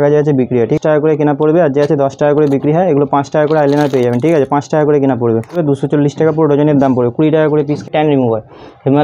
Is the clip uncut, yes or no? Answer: no